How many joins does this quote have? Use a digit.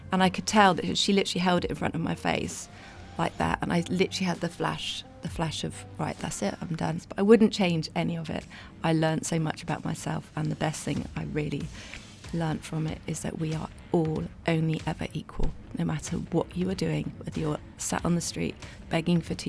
1